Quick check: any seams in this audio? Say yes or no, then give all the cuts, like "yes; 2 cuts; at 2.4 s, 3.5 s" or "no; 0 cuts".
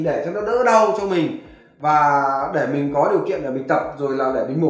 no; 0 cuts